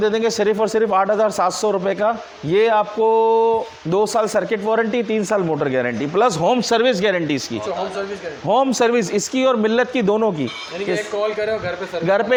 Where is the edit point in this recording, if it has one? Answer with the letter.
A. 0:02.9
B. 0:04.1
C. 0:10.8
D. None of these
D